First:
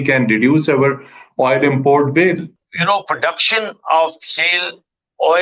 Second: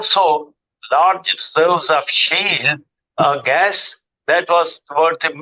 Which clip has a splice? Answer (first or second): first